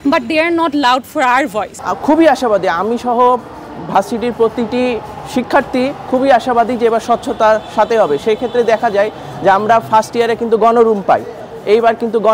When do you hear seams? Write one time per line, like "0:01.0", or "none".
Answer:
0:01.8